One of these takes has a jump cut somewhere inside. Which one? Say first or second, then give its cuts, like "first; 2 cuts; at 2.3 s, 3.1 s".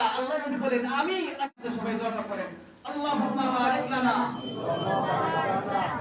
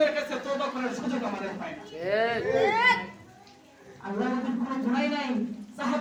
first; 1 cut; at 1.5 s